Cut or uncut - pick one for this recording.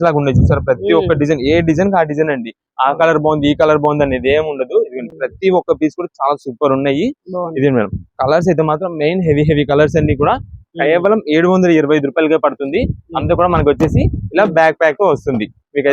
uncut